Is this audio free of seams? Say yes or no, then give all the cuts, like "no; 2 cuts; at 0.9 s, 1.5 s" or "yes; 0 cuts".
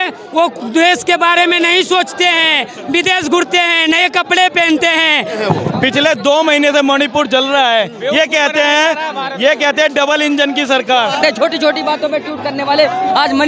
no; 2 cuts; at 5.4 s, 11.2 s